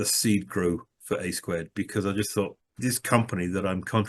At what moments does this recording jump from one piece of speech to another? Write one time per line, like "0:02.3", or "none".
0:02.6